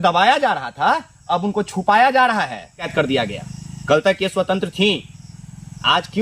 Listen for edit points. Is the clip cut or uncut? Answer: cut